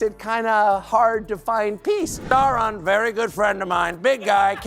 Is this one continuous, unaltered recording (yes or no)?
no